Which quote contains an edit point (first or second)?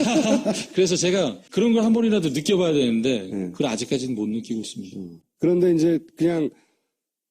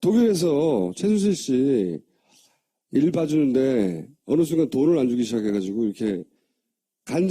first